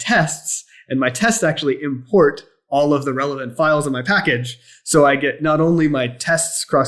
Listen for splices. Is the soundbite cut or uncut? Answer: uncut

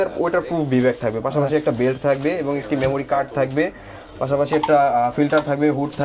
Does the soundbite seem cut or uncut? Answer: uncut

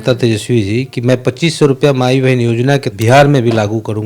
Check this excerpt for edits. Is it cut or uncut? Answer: cut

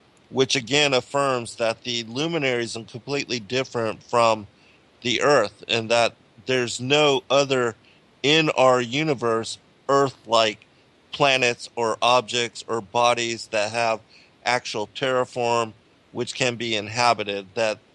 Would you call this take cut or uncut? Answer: cut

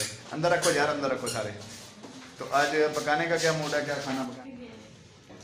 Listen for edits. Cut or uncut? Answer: cut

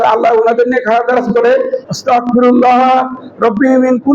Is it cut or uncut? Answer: cut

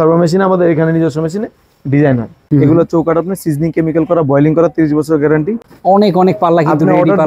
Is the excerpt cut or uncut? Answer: cut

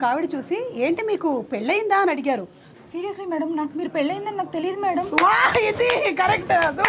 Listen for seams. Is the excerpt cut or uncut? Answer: uncut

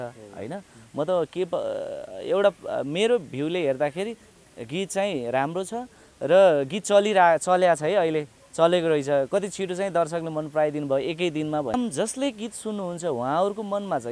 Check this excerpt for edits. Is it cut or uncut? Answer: cut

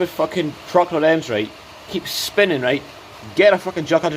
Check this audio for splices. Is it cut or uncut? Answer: uncut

